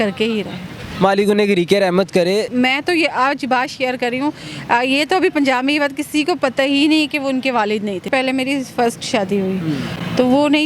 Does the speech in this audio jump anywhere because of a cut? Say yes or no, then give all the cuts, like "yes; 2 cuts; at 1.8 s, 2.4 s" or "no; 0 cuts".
yes; 2 cuts; at 2.5 s, 8.1 s